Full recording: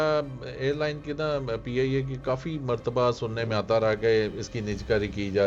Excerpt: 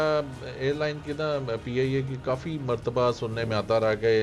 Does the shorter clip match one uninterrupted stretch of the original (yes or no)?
yes